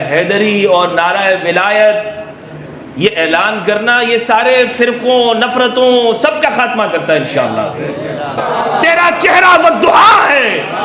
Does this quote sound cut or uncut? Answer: cut